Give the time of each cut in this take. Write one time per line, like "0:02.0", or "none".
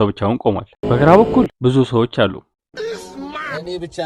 0:02.6